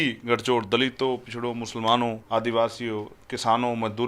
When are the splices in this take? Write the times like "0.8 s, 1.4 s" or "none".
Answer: 2.2 s

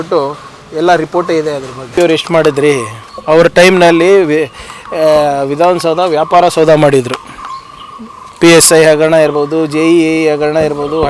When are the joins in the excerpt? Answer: 1.9 s

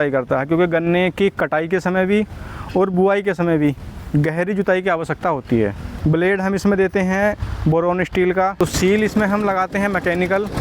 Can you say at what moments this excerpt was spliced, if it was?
5.9 s, 8.6 s

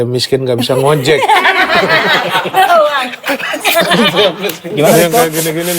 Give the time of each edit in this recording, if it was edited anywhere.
4.7 s

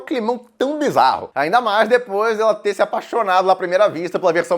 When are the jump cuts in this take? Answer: 1.3 s

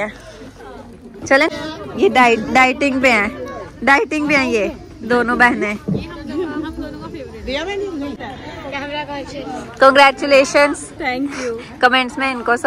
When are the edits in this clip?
1.5 s, 8.3 s

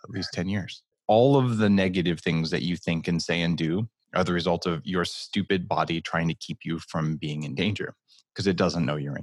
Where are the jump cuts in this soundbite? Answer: 1.0 s

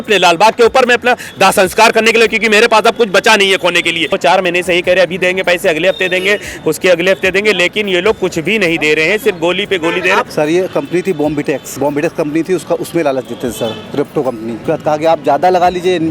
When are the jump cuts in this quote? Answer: 4.1 s, 10.3 s, 11.7 s, 14.6 s

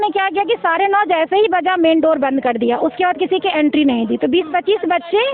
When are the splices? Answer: none

